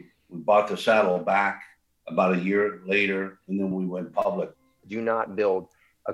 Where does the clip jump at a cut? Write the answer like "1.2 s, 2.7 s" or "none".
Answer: 3.7 s, 4.8 s

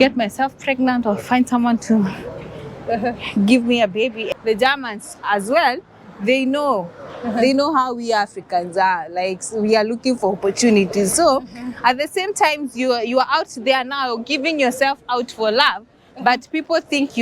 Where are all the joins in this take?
4.2 s

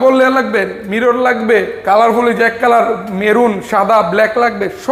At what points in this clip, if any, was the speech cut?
none

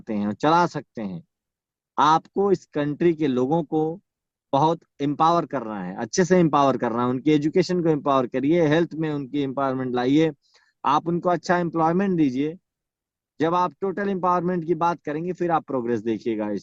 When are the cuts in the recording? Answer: none

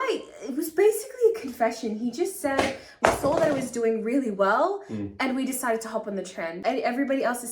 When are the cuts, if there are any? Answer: 6.5 s

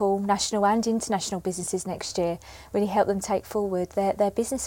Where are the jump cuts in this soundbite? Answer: none

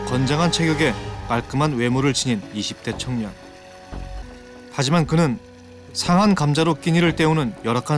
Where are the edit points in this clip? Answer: 4.2 s

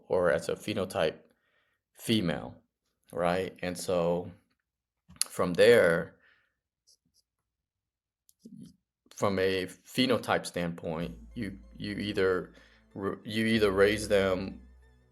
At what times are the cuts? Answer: none

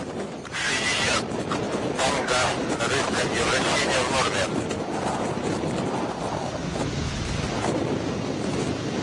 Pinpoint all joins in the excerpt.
8.1 s

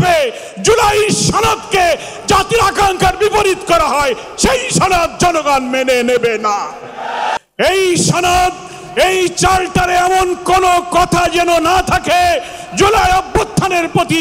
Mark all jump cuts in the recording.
7.3 s

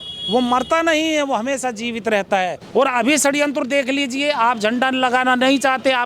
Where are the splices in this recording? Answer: 2.6 s

